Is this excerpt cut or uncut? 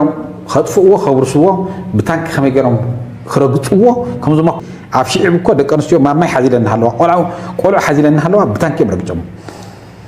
cut